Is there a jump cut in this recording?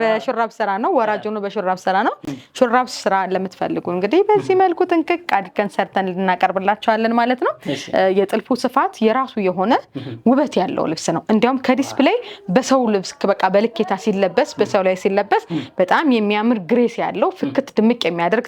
no; 0 cuts

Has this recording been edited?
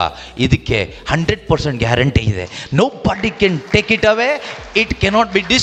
no; 0 cuts

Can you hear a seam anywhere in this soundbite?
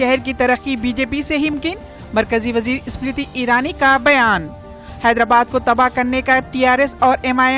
yes; 1 cut; at 1.5 s

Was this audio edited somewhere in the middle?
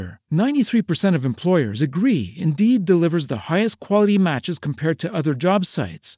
no; 0 cuts

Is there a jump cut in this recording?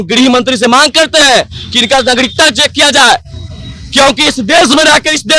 no; 0 cuts

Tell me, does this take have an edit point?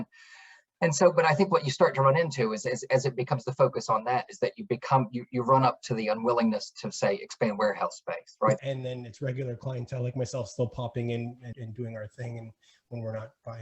yes; 2 cuts; at 8.6 s, 11.5 s

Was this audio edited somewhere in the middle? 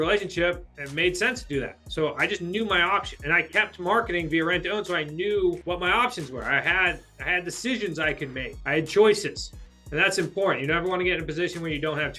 yes; 3 cuts; at 3.1 s, 5.6 s, 8.5 s

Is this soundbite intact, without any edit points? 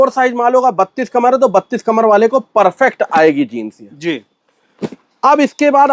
yes; 0 cuts

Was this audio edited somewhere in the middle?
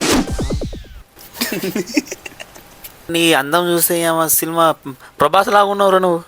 yes; 1 cut; at 3.1 s

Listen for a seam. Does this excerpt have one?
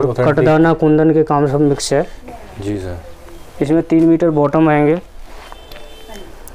no; 0 cuts

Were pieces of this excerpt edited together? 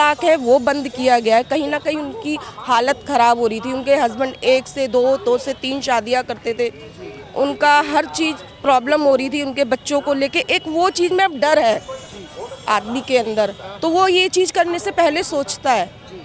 no; 0 cuts

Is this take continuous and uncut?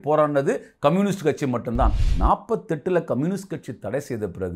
no; 1 cut; at 2.0 s

